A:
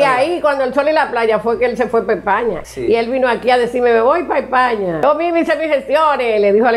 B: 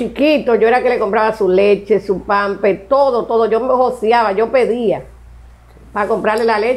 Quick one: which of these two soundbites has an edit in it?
A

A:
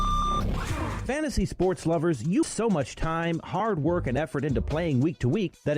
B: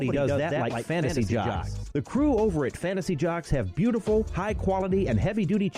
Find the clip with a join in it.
A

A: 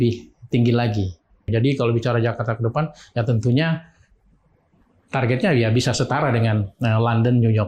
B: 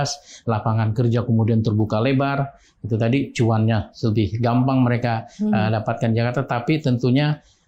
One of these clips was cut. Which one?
A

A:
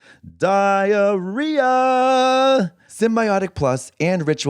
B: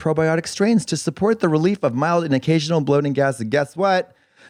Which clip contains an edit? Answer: A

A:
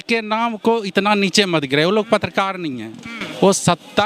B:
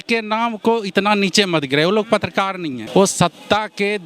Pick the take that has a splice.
B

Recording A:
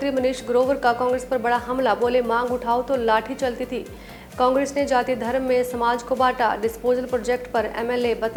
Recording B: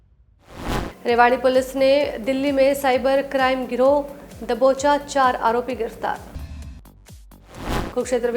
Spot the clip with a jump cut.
B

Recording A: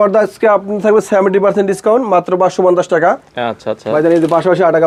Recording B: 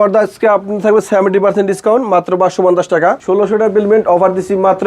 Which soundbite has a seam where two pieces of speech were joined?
B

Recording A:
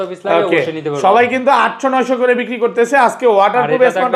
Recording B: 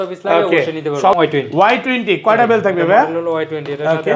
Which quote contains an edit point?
B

